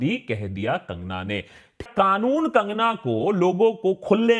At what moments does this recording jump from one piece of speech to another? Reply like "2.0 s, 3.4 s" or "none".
1.8 s